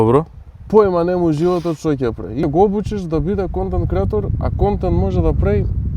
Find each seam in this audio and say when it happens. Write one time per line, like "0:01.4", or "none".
0:02.4